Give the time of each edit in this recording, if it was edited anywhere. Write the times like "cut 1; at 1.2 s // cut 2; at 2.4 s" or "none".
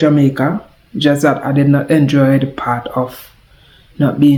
none